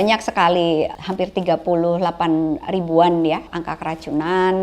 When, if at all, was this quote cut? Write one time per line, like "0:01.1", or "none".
0:00.9
0:03.5